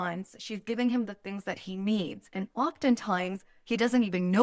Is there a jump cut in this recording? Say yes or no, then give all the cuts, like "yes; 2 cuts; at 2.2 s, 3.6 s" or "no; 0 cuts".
no; 0 cuts